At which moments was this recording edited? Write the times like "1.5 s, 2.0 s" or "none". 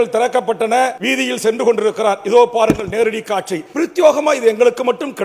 1.0 s, 3.6 s